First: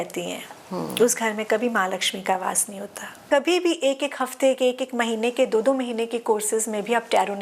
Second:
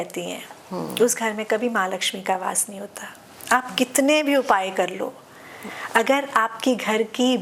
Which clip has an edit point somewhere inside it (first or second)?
first